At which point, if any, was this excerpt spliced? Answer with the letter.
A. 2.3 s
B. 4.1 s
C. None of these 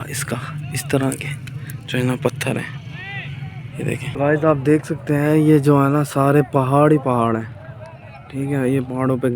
B